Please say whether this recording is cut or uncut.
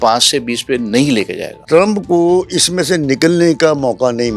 cut